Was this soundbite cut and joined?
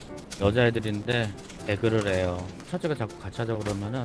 yes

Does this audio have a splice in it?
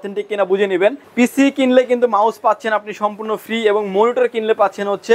yes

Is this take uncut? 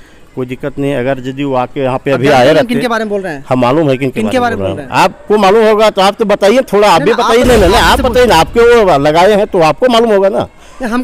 yes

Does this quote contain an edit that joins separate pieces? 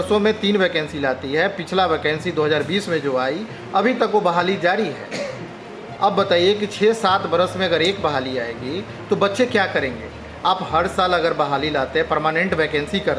no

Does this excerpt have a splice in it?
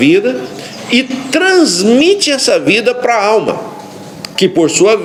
no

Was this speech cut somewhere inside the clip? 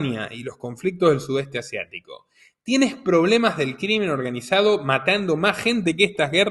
no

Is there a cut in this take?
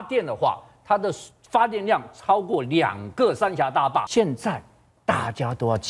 yes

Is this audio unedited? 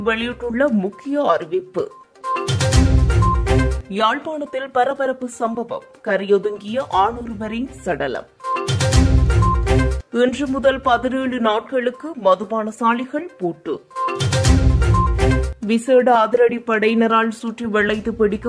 yes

